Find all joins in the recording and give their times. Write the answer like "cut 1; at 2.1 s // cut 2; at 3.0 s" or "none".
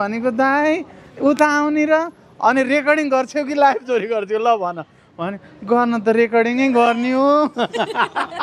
none